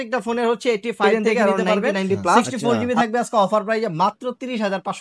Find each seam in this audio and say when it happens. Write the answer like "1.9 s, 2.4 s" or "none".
2.4 s